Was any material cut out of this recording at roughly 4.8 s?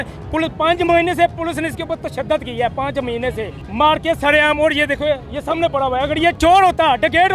no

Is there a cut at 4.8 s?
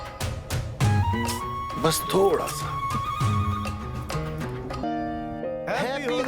yes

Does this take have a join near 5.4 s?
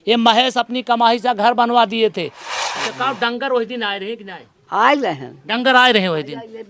no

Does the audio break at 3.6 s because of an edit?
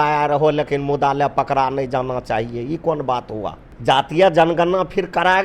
yes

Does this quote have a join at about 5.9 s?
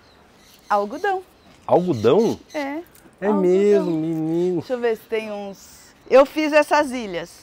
yes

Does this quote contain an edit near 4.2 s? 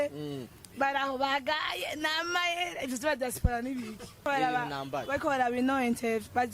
yes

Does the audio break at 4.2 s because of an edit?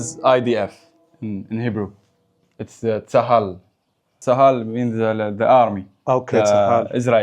yes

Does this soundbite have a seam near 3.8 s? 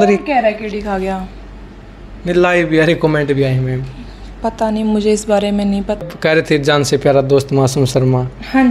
no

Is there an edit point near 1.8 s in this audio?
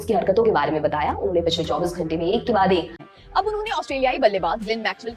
no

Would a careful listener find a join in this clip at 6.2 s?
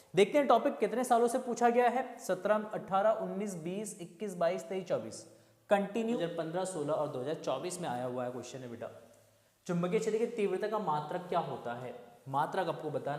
yes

